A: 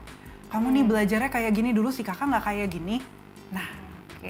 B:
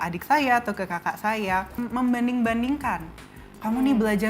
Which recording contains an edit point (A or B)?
B